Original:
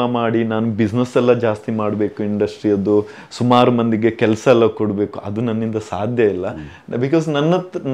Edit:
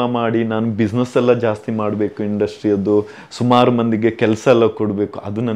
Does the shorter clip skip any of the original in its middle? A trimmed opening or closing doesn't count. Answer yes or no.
no